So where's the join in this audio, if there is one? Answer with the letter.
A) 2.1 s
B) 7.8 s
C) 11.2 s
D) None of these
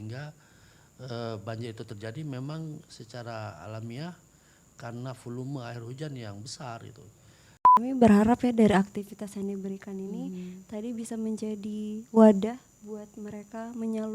B